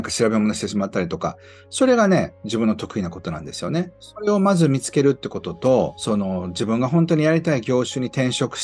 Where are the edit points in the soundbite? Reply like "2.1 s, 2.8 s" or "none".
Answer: 4.1 s, 6.0 s